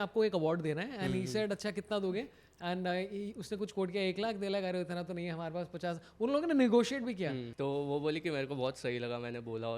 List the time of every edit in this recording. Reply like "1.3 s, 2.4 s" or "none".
7.4 s